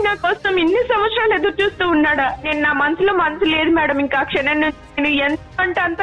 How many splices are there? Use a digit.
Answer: 1